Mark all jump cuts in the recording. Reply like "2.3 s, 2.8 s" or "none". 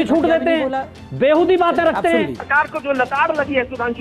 2.4 s